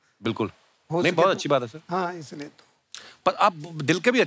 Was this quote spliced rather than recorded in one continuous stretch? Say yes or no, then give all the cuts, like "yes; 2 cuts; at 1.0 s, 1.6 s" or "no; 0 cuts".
no; 0 cuts